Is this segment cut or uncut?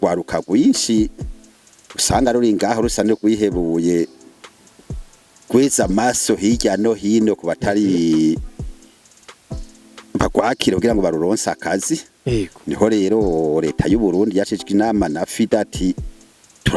cut